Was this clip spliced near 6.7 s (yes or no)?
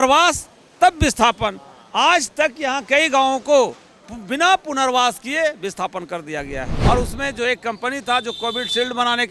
yes